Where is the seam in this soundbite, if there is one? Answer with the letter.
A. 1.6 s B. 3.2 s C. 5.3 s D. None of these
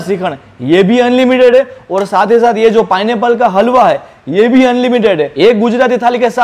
C